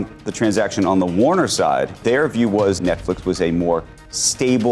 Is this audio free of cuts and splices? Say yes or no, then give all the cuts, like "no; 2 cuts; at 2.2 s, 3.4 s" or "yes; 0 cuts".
no; 2 cuts; at 2.0 s, 2.8 s